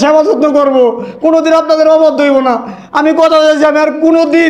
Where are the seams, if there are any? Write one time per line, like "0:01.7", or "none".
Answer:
none

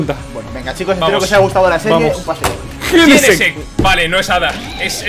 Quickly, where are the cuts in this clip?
none

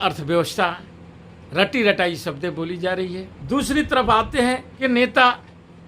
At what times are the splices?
0:03.3
0:04.7

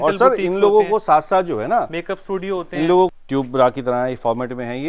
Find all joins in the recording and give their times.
0:03.1

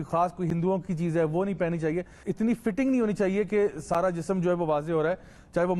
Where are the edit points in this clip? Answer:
0:02.3

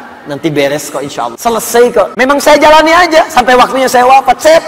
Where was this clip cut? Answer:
0:01.3
0:02.1

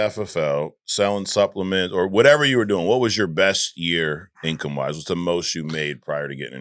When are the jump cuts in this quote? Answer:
none

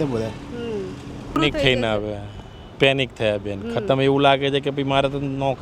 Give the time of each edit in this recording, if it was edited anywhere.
0:01.4

